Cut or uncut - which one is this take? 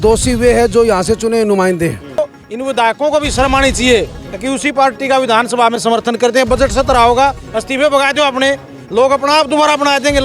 cut